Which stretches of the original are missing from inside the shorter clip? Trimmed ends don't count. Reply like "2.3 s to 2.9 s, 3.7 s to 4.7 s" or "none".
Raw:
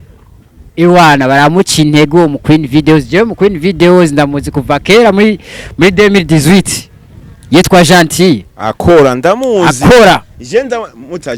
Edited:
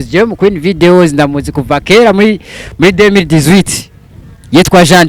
none

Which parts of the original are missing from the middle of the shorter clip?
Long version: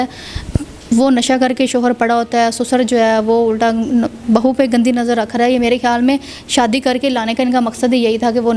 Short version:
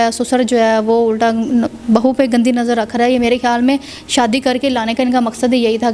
none

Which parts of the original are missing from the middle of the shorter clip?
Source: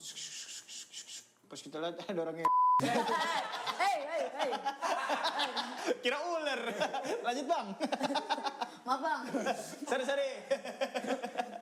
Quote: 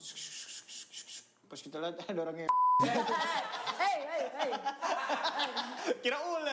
none

